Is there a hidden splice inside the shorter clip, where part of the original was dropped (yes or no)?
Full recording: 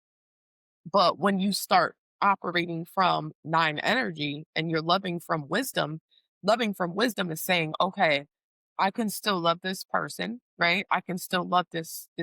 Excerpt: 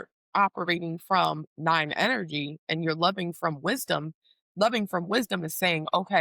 no